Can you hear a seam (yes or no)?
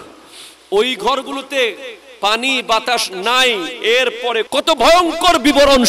yes